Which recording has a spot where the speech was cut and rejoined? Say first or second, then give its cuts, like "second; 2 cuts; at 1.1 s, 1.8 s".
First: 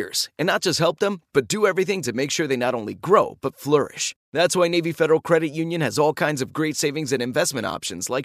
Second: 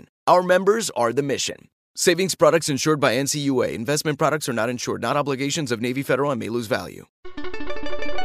second; 1 cut; at 7.3 s